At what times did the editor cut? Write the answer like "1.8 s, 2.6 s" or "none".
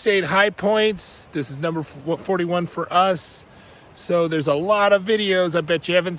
none